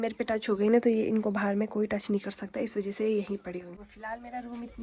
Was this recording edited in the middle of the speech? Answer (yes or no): no